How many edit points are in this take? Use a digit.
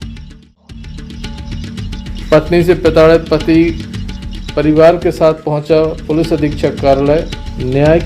1